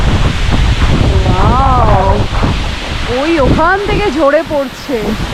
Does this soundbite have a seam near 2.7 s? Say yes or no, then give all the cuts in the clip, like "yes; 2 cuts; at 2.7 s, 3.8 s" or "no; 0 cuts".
no; 0 cuts